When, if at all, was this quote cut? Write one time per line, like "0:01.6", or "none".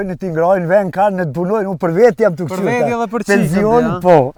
none